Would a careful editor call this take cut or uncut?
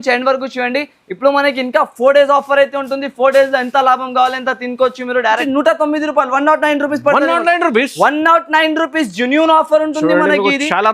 cut